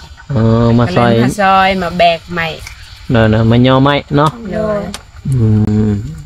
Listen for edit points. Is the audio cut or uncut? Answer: uncut